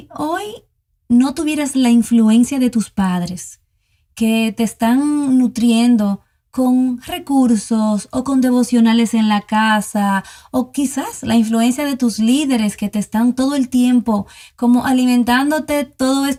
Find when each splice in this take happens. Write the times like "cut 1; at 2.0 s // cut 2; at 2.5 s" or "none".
none